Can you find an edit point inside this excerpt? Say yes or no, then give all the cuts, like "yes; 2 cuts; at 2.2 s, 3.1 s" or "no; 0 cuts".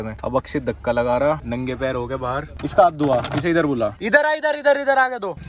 no; 0 cuts